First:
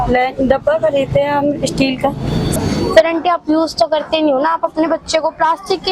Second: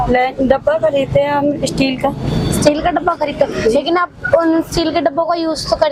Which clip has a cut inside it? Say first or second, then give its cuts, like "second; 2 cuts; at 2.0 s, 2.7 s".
first; 1 cut; at 2.5 s